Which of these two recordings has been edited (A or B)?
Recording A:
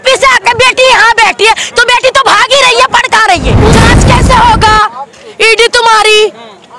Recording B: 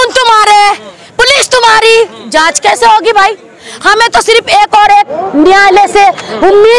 A